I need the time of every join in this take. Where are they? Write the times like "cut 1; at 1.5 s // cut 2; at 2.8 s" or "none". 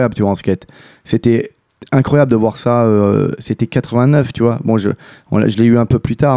none